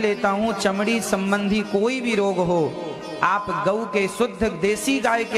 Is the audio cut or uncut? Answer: uncut